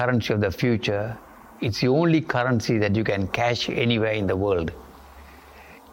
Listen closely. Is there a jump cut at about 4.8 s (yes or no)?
no